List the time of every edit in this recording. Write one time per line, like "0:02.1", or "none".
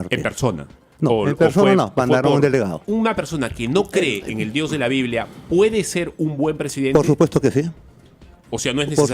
0:02.8

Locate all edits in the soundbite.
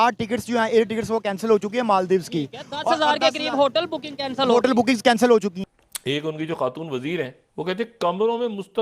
0:05.9
0:07.4

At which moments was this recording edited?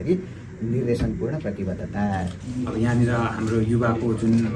0:02.4

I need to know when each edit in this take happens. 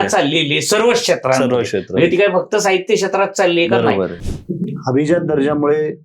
0:04.2

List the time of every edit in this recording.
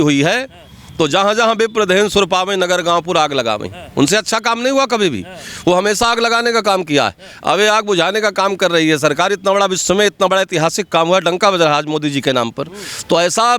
none

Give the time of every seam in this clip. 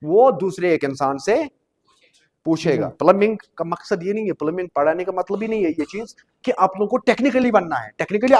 0:03.0

